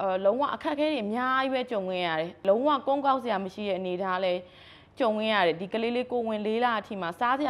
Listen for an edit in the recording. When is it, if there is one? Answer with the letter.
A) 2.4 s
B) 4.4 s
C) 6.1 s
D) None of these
A